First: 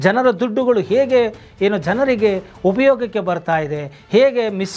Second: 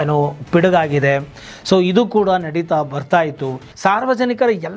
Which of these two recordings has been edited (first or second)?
second